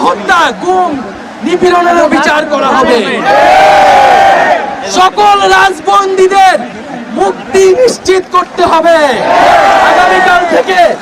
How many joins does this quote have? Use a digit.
1